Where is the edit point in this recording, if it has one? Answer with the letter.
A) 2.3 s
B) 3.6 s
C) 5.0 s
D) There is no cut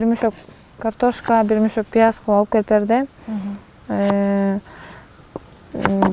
D